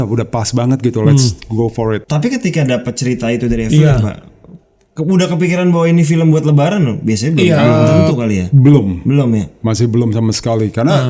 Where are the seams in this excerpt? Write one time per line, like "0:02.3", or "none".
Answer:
0:02.1